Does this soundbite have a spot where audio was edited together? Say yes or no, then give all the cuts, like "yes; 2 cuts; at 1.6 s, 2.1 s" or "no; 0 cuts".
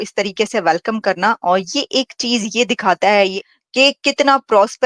yes; 1 cut; at 3.4 s